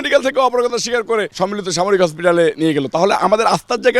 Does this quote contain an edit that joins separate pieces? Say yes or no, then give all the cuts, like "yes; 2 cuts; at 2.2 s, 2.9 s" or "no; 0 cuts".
yes; 1 cut; at 1.3 s